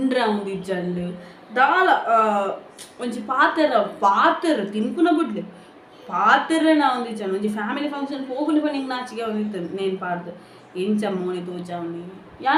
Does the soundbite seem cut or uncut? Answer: uncut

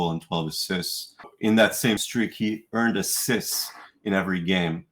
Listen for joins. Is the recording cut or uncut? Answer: cut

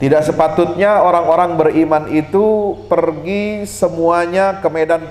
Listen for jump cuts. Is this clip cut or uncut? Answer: uncut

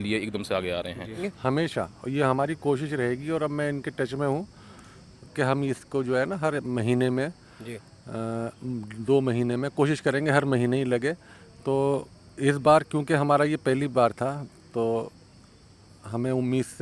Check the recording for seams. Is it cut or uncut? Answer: cut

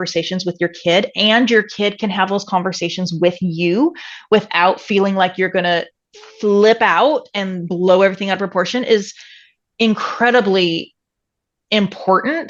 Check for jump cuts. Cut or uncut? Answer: uncut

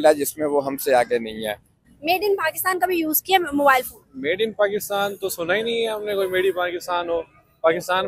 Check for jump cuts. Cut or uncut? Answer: cut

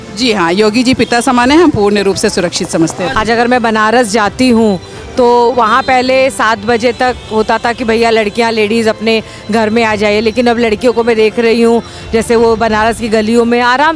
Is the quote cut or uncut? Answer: cut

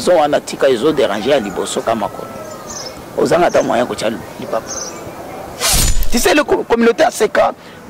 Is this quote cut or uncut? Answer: cut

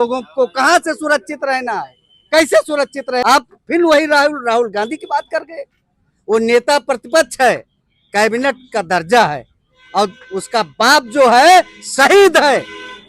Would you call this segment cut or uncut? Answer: cut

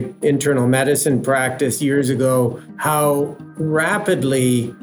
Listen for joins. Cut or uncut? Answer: cut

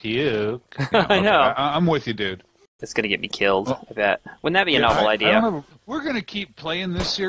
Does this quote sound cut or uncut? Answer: cut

